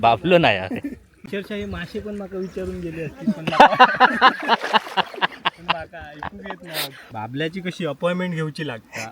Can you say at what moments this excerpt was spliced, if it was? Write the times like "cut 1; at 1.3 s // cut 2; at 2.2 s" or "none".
cut 1; at 7.0 s